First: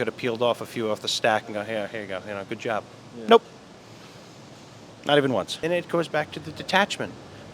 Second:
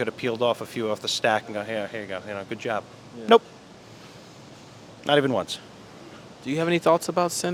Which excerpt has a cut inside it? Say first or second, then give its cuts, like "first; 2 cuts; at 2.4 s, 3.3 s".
first; 1 cut; at 5.6 s